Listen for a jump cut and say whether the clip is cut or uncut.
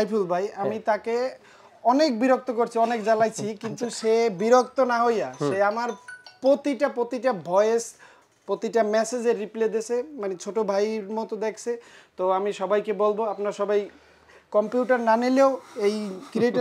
uncut